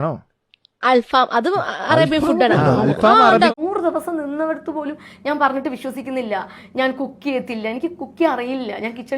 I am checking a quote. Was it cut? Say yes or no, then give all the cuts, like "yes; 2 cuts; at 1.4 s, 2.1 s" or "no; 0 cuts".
yes; 1 cut; at 3.5 s